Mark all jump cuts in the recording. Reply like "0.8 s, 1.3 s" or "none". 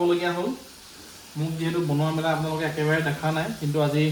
none